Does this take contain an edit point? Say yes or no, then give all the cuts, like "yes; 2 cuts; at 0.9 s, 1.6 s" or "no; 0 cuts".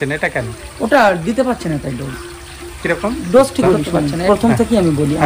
yes; 1 cut; at 3.6 s